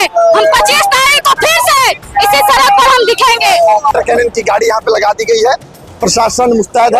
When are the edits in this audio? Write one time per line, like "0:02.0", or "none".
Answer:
0:03.9